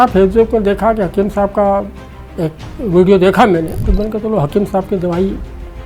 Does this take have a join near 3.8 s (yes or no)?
yes